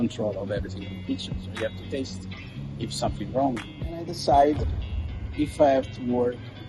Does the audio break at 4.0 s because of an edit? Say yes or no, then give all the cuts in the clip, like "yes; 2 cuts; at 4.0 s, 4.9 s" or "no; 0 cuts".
yes; 1 cut; at 4.0 s